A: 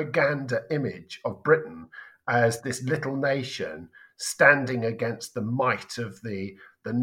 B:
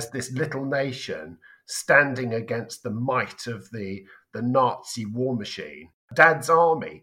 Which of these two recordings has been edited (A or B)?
B